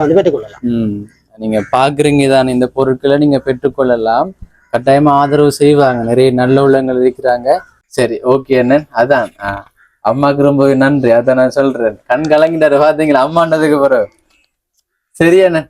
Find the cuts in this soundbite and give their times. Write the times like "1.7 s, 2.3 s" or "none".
7.7 s